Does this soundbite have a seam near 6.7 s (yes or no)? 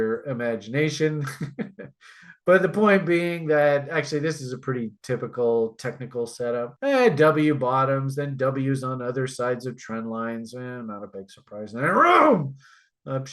yes